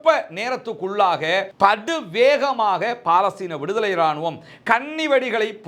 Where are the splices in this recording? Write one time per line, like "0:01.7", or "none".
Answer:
none

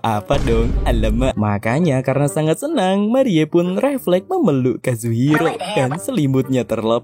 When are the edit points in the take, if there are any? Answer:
0:01.3

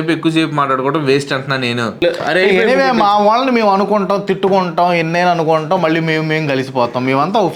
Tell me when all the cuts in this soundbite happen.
0:02.0

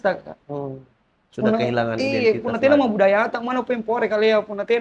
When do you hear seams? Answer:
none

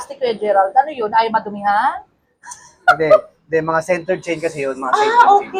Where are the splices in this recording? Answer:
none

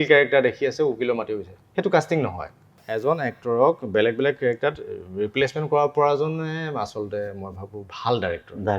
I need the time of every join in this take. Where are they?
0:02.8

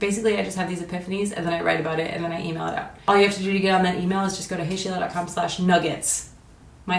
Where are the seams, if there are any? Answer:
0:02.9

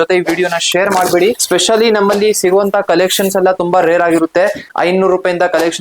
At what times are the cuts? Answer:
0:01.4
0:04.6

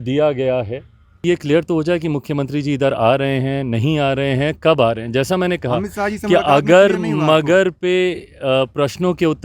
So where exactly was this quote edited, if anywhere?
0:01.2

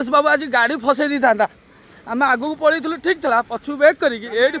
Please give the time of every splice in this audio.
none

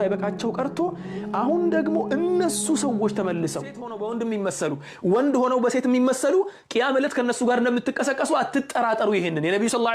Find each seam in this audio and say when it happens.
0:03.8

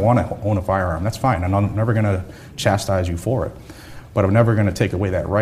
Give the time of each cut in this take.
none

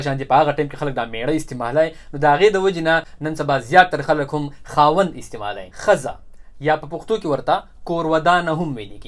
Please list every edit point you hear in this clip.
0:03.1
0:05.7

